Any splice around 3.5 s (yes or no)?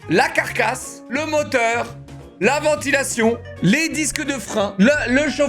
yes